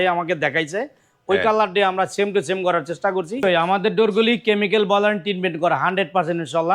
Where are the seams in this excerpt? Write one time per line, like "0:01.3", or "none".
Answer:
0:03.4